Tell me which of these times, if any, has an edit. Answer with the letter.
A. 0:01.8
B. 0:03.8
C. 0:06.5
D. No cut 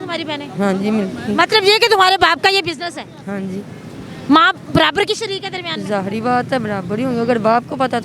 D